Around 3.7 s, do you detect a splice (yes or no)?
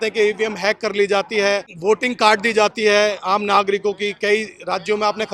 no